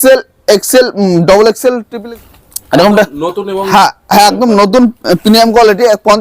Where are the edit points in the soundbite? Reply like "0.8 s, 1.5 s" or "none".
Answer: 1.9 s